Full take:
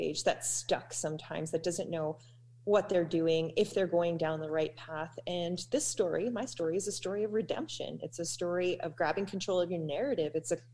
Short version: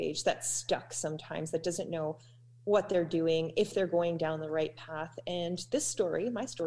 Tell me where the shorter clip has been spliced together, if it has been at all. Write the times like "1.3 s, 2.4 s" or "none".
none